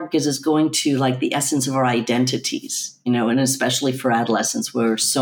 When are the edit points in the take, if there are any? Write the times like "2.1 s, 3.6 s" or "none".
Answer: none